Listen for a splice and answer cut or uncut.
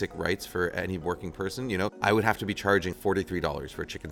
cut